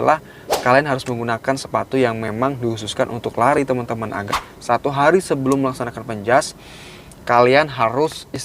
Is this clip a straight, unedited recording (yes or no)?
no